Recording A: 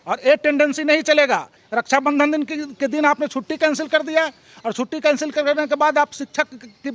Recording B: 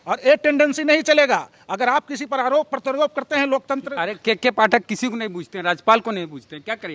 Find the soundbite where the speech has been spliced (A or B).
A